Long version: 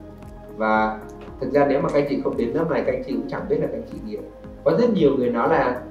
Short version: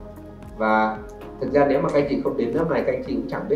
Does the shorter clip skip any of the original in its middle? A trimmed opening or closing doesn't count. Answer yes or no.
no